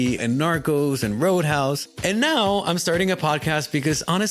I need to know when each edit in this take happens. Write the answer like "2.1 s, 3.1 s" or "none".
1.9 s